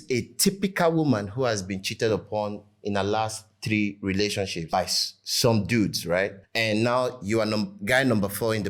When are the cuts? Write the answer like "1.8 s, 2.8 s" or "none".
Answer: none